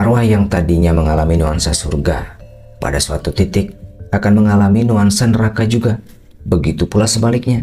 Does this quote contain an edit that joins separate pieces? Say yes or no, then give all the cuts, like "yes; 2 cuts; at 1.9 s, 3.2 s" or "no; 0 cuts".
no; 0 cuts